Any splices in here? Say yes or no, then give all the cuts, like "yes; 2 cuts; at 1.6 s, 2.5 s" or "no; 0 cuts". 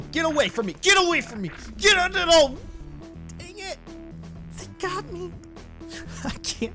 yes; 1 cut; at 3.0 s